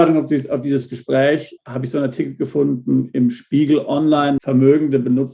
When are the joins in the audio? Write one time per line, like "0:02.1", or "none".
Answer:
0:01.6
0:04.4